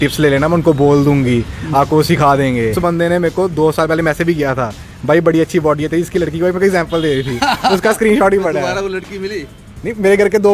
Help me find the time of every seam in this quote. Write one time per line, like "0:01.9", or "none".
0:02.8